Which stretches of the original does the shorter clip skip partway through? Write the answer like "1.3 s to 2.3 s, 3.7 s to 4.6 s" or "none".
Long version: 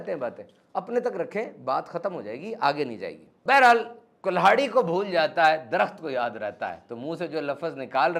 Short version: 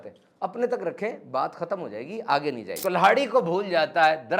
3.0 s to 4.1 s